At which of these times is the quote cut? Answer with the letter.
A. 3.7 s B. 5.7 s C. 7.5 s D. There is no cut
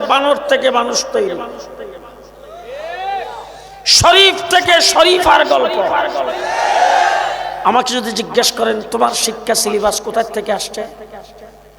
C